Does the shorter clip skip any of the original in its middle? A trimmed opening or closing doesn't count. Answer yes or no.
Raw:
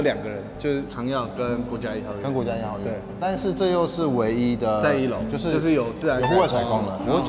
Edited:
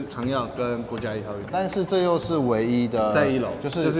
yes